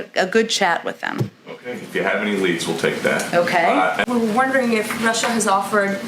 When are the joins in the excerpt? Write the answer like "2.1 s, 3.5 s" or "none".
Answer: 4.0 s